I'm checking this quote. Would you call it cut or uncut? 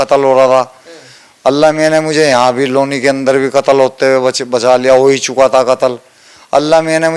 uncut